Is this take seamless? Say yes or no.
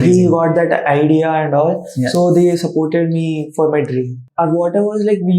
no